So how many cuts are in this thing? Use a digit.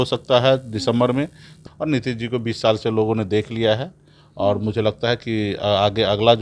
1